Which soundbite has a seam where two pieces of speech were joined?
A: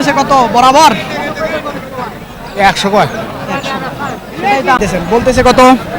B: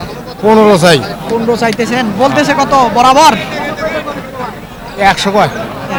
A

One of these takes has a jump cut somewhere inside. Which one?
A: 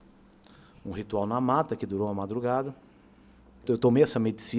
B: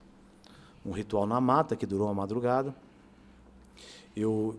A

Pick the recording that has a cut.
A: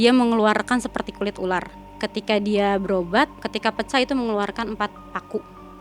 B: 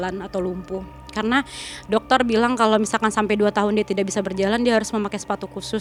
A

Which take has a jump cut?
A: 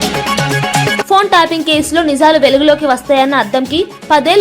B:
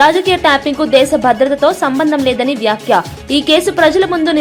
A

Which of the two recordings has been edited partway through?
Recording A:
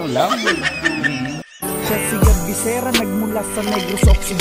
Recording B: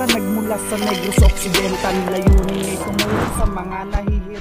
A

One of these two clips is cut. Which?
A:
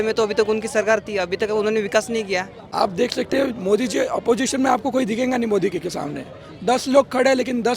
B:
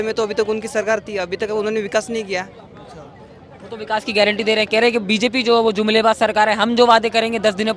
A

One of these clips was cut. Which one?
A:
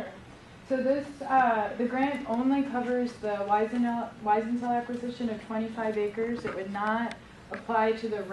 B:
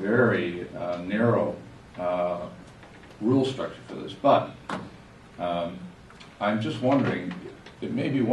B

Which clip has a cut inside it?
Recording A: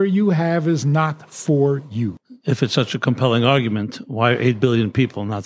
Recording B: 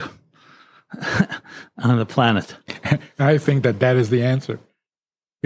A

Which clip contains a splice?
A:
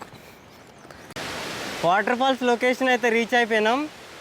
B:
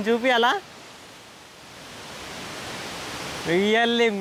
A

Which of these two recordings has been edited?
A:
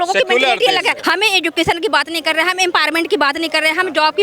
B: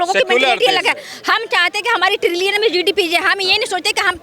A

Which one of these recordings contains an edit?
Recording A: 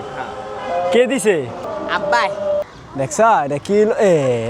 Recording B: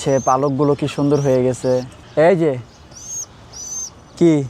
A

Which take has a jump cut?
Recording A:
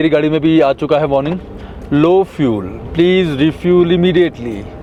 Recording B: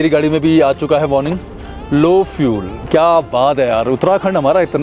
B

